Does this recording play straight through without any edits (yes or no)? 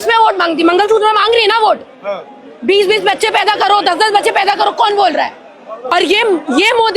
no